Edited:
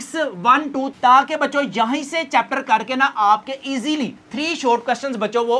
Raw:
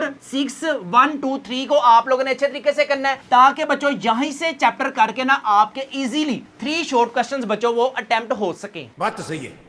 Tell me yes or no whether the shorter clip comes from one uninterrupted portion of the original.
no